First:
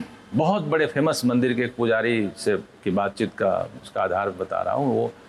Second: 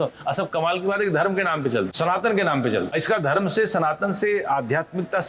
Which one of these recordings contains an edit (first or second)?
second